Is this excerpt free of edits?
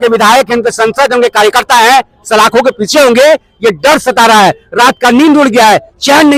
yes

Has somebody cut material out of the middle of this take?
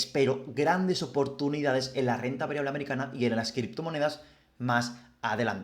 no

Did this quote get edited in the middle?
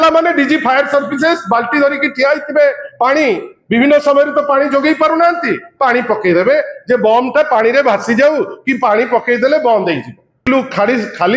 yes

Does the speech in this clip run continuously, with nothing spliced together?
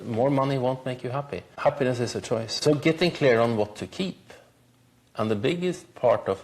no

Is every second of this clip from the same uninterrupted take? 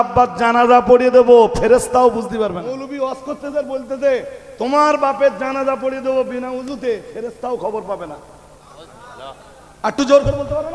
no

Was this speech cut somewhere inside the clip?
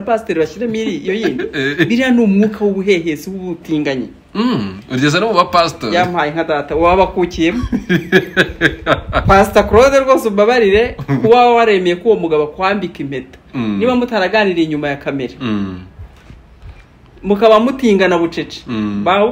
no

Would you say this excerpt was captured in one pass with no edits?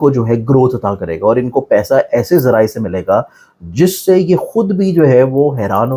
yes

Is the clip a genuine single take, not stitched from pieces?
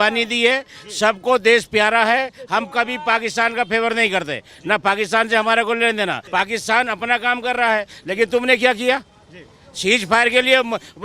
no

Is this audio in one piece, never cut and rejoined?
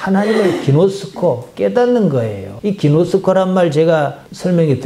yes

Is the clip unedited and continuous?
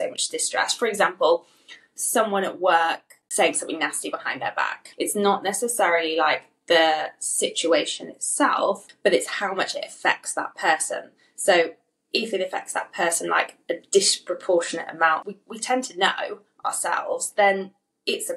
no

